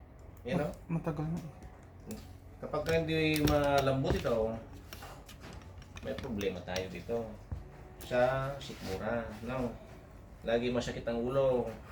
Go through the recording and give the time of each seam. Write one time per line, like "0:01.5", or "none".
none